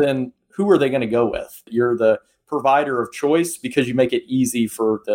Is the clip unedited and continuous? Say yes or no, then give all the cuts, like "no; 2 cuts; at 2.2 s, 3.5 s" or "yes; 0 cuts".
no; 1 cut; at 1.7 s